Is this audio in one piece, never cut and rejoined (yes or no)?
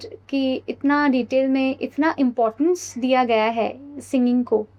yes